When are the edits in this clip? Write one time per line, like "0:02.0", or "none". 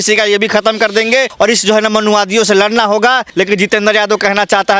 0:01.3
0:03.3

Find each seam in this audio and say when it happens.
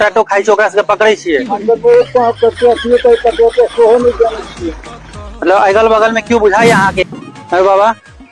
0:07.1

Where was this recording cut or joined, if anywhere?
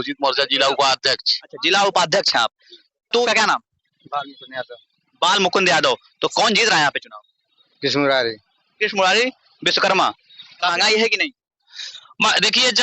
0:03.3
0:10.7

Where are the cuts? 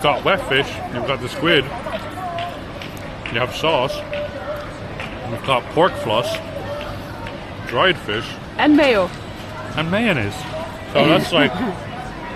none

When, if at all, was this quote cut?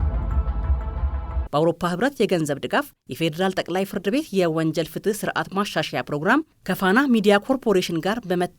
0:01.4

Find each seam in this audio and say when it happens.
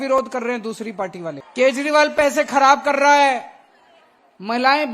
0:01.4

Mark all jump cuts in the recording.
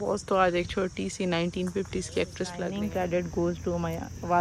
0:02.7

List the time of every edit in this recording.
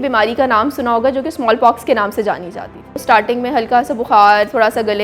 0:03.0

